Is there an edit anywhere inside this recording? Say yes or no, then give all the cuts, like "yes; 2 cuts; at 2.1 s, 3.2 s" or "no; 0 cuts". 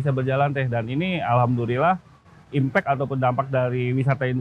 no; 0 cuts